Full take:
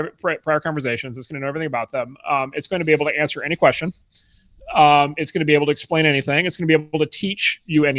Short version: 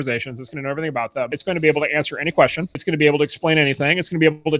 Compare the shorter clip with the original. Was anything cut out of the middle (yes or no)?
yes